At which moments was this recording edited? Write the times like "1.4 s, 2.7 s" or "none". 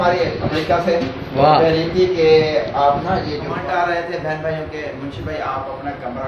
3.5 s